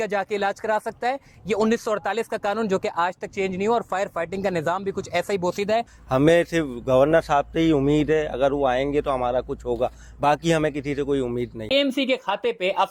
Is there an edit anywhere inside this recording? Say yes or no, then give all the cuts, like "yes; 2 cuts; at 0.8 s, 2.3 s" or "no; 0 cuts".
yes; 2 cuts; at 6.0 s, 11.6 s